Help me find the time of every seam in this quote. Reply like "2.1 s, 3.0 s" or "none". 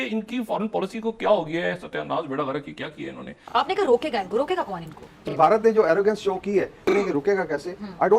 3.3 s, 5.2 s, 6.8 s